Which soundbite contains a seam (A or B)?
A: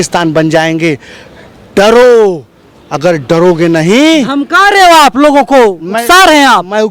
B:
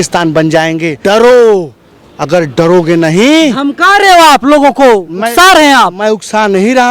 B